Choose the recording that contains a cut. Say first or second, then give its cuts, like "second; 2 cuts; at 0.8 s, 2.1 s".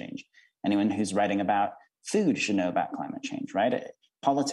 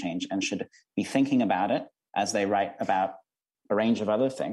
second; 1 cut; at 3.5 s